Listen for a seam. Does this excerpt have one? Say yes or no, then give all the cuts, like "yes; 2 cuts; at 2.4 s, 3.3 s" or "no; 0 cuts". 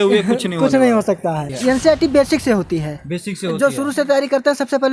yes; 1 cut; at 1.5 s